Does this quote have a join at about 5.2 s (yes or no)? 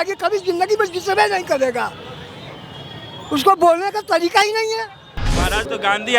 yes